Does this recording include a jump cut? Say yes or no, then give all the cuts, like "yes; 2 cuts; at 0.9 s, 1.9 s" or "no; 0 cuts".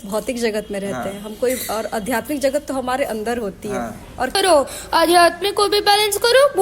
yes; 1 cut; at 4.4 s